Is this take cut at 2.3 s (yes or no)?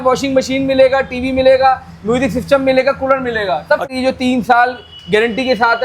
no